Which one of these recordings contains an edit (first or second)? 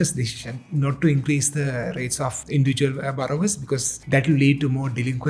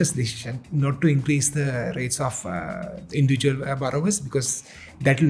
first